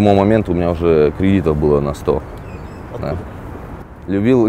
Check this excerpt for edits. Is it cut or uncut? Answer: uncut